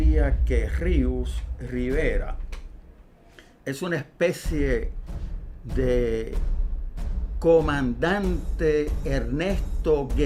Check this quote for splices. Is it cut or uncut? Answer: uncut